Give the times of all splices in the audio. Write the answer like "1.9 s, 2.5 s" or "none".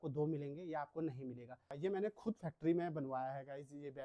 1.7 s